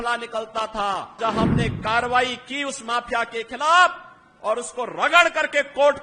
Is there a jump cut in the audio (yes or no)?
yes